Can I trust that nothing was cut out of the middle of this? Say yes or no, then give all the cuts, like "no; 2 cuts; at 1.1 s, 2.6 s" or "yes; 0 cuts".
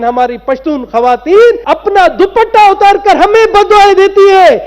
no; 1 cut; at 1.6 s